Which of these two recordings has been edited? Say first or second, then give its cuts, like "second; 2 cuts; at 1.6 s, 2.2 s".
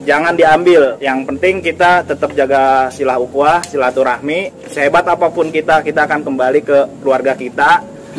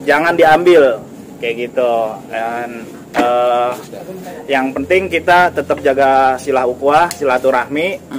first; 2 cuts; at 1.0 s, 4.6 s